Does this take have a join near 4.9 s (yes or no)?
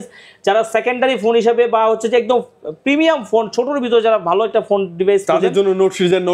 no